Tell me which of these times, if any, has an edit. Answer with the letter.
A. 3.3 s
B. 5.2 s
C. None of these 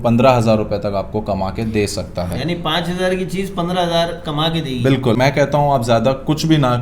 B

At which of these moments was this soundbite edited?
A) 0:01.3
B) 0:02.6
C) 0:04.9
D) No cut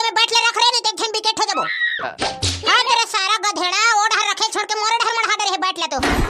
B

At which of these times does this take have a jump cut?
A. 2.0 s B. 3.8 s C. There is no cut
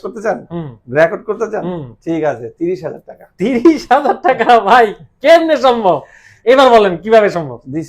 C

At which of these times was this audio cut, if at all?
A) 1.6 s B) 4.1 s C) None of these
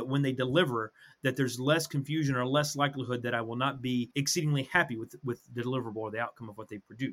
B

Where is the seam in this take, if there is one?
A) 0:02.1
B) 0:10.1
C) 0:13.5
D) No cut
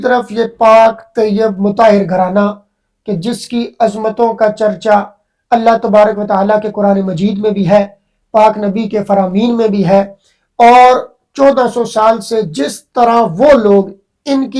D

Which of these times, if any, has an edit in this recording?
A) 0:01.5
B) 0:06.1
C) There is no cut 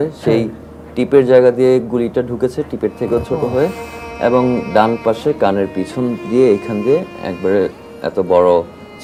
C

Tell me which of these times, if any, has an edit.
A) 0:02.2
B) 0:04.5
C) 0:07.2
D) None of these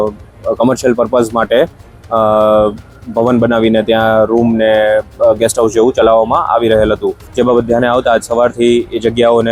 C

